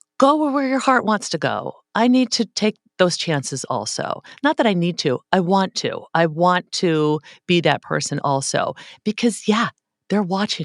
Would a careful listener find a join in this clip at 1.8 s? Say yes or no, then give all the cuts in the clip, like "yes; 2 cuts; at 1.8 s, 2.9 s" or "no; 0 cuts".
no; 0 cuts